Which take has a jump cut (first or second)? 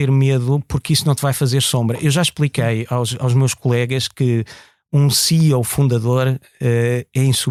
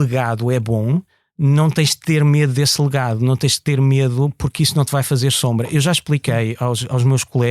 second